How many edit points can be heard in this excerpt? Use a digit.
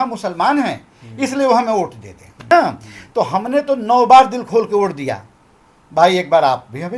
1